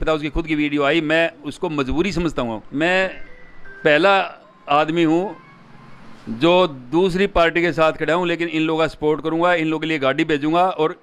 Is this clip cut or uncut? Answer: cut